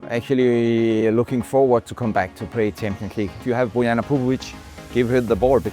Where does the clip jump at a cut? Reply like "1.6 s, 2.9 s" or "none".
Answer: 3.4 s